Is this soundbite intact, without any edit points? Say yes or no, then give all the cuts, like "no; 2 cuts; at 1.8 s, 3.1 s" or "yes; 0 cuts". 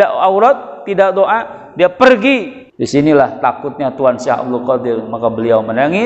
no; 1 cut; at 2.6 s